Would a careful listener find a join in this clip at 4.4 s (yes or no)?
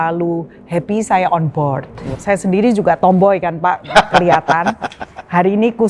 no